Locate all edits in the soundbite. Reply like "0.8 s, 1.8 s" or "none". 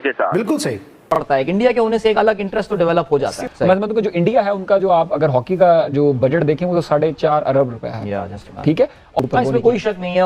1.1 s, 9.2 s